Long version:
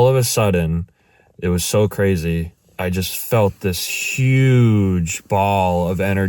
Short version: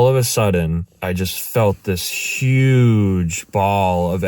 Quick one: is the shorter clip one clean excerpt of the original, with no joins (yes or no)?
no